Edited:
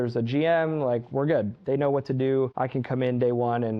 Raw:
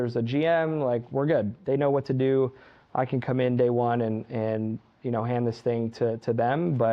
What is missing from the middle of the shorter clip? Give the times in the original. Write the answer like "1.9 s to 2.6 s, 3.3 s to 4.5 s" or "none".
2.5 s to 2.9 s